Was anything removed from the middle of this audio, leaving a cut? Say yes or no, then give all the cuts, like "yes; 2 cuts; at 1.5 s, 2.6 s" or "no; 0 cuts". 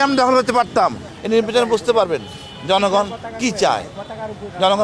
yes; 1 cut; at 1.1 s